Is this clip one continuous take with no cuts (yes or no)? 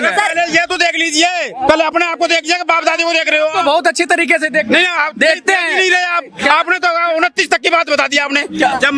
yes